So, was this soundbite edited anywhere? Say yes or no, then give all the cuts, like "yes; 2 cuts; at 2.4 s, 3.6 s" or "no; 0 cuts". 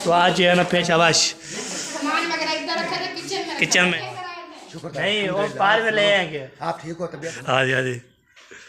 yes; 3 cuts; at 0.8 s, 4.0 s, 7.3 s